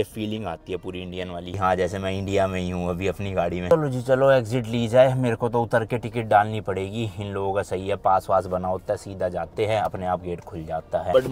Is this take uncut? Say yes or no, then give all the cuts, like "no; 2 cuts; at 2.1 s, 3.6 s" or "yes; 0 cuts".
yes; 0 cuts